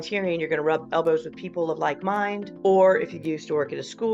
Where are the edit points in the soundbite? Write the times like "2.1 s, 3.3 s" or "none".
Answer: 2.5 s